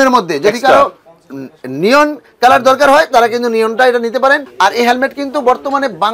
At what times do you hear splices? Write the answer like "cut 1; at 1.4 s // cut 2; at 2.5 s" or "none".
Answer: cut 1; at 4.5 s

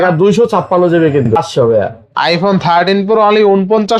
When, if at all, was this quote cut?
cut 1; at 1.3 s

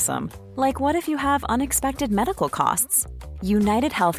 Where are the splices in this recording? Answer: none

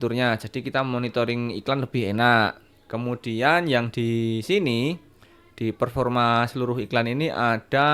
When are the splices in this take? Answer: none

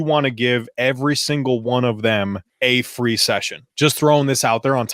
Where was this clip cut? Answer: cut 1; at 2.5 s // cut 2; at 3.6 s

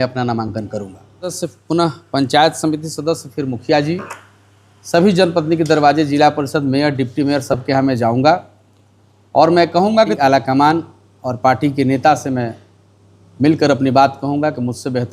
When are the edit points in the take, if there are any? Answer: cut 1; at 1.4 s // cut 2; at 10.2 s

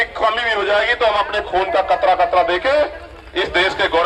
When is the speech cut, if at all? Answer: none

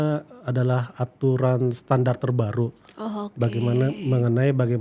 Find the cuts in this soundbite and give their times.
none

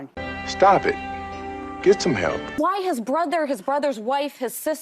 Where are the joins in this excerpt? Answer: cut 1; at 2.5 s

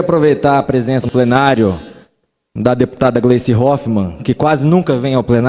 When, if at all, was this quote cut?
cut 1; at 1.1 s

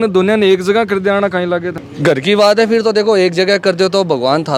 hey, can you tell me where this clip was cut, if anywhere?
none

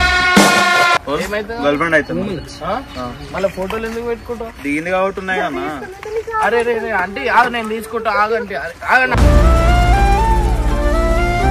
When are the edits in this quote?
cut 1; at 1.0 s

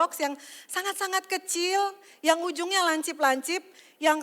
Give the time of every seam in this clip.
none

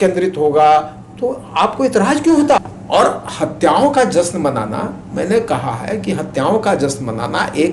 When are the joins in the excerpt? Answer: cut 1; at 2.6 s

